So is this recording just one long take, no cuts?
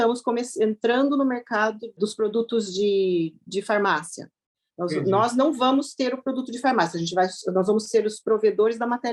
no; 1 cut; at 2.0 s

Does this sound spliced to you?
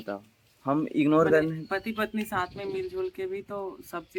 no; 0 cuts

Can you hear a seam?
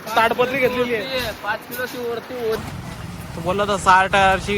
yes; 1 cut; at 2.6 s

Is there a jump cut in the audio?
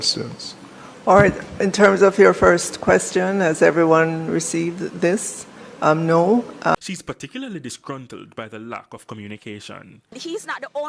yes; 1 cut; at 6.8 s

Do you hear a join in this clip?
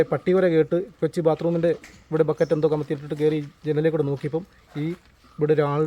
no; 0 cuts

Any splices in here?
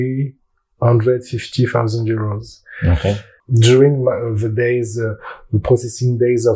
no; 0 cuts

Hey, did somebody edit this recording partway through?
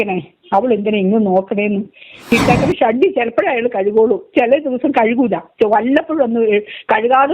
yes; 1 cut; at 2.3 s

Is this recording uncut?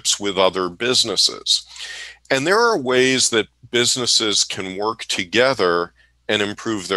yes; 0 cuts

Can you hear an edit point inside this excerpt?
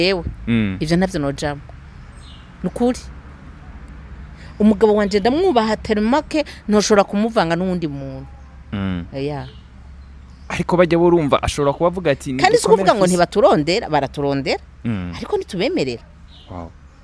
no; 0 cuts

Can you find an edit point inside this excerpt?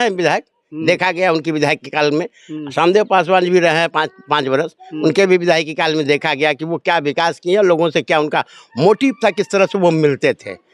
no; 0 cuts

